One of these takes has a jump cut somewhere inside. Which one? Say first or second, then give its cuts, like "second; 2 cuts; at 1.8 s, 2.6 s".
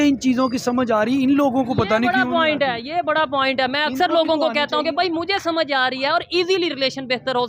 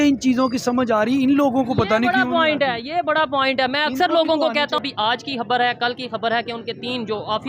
second; 1 cut; at 4.8 s